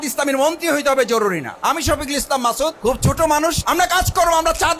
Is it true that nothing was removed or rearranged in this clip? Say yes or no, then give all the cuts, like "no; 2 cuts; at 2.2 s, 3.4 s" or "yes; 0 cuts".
no; 2 cuts; at 2.8 s, 3.6 s